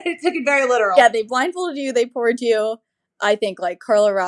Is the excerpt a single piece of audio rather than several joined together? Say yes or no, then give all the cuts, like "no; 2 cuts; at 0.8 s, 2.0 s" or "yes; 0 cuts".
no; 1 cut; at 0.9 s